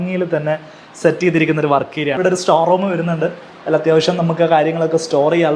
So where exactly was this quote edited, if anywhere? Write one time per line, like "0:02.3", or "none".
0:02.1